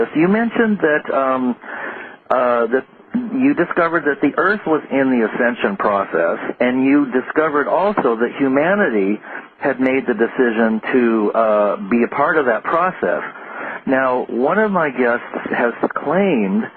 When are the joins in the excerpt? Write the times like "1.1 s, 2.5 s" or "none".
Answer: 8.6 s